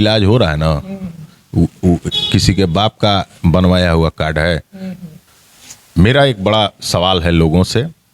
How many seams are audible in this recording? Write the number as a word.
one